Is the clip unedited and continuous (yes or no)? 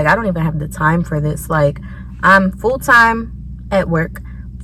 yes